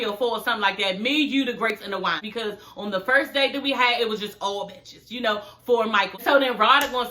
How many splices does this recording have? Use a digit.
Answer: 2